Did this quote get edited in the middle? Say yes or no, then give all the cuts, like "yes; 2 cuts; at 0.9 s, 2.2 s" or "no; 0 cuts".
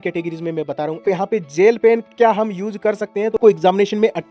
yes; 2 cuts; at 1.0 s, 3.4 s